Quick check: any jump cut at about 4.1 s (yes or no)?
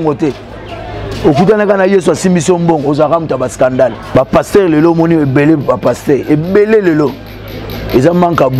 yes